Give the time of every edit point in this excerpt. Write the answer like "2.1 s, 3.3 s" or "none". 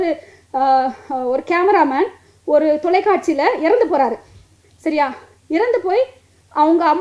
none